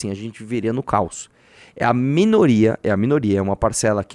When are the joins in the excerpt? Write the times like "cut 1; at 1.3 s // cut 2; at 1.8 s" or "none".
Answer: none